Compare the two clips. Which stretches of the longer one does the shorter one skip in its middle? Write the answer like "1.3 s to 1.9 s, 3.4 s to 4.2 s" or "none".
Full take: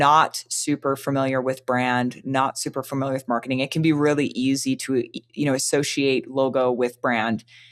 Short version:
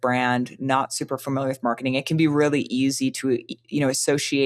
none